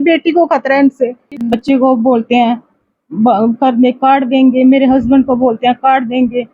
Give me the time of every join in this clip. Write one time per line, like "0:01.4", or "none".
0:01.5